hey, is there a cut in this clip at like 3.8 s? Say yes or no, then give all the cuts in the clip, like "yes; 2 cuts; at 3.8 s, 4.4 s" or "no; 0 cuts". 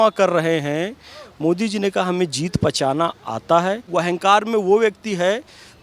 yes; 1 cut; at 3.8 s